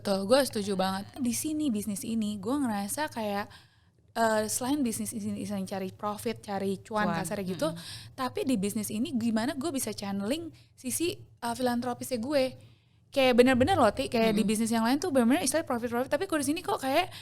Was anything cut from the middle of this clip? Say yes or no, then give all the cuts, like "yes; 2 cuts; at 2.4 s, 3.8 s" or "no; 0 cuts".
yes; 1 cut; at 1.2 s